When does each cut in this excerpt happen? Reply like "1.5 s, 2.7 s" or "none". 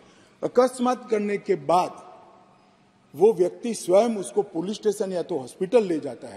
none